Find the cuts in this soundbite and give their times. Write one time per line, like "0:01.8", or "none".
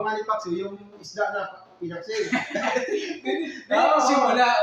none